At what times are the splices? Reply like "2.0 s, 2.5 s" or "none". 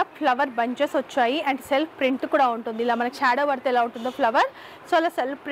none